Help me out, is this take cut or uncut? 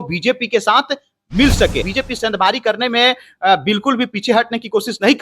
cut